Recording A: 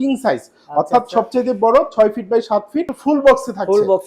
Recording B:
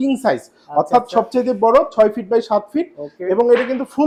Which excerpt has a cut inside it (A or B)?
A